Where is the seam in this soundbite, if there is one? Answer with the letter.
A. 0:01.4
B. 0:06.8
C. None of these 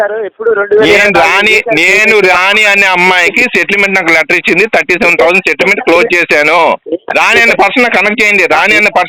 C